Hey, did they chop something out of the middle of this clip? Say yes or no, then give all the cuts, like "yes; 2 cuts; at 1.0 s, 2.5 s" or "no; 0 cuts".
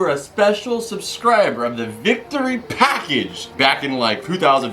yes; 1 cut; at 3.4 s